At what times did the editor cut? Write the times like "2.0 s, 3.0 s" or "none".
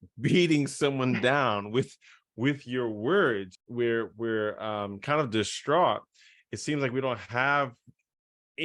3.6 s